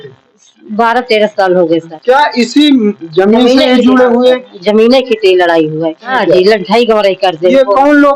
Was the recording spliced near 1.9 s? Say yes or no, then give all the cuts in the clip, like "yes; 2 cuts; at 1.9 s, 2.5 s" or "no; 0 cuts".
yes; 2 cuts; at 1.9 s, 6.1 s